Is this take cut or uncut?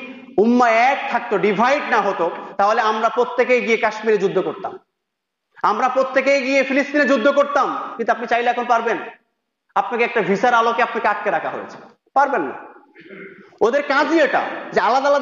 uncut